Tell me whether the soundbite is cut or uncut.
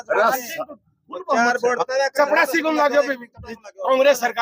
cut